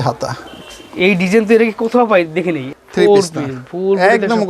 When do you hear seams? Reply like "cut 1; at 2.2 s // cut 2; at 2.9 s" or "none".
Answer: cut 1; at 2.7 s